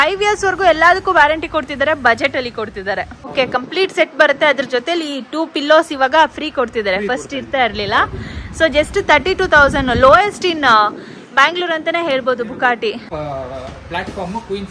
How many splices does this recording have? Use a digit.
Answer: 2